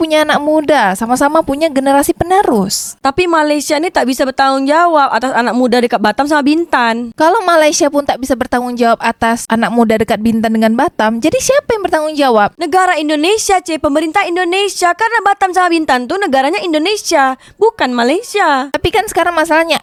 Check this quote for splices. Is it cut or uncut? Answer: uncut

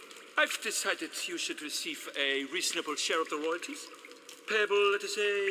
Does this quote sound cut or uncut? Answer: uncut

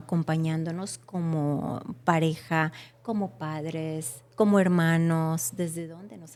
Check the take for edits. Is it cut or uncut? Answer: uncut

